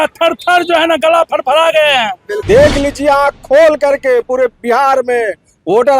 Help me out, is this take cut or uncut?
cut